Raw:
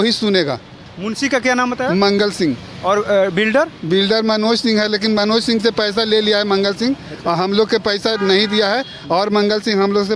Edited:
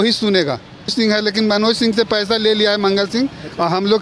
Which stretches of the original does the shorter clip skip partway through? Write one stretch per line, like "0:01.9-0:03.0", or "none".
0:00.9-0:04.6